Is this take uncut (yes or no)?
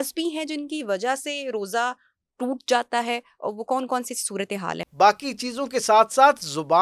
no